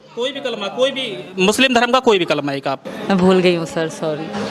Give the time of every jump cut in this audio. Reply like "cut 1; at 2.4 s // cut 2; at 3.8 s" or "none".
cut 1; at 2.9 s